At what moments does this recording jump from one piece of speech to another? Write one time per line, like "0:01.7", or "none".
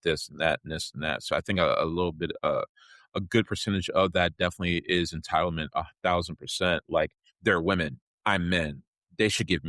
none